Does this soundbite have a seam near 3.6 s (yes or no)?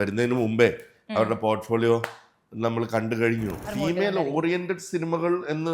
yes